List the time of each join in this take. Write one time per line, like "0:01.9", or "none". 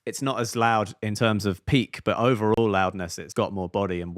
0:03.2